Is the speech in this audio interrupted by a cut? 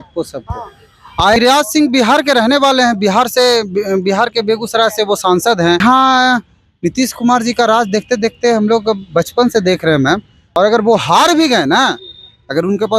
yes; 3 cuts; at 1.4 s, 5.8 s, 10.4 s

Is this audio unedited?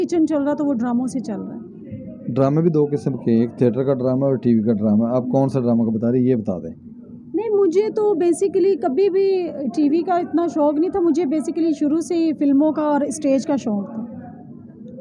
yes; 0 cuts

